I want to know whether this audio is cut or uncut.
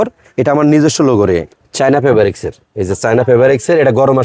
cut